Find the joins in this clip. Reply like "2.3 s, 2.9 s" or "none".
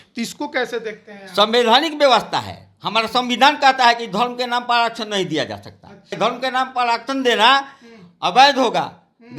6.2 s